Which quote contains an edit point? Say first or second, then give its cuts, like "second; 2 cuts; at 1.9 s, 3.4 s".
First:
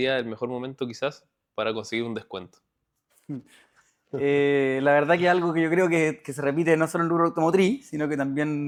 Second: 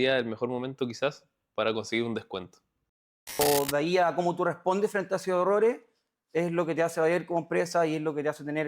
second; 1 cut; at 3.4 s